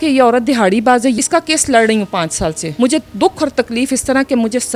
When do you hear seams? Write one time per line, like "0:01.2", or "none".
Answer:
0:01.2
0:02.6